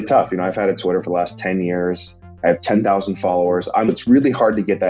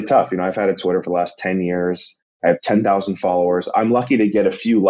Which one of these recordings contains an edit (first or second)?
first